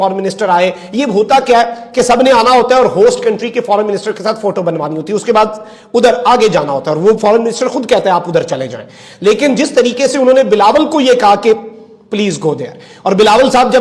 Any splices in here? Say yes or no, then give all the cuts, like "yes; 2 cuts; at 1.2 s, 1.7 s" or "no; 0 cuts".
no; 0 cuts